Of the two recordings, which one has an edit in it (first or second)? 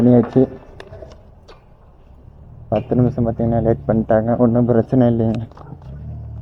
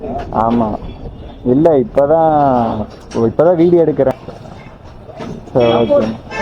second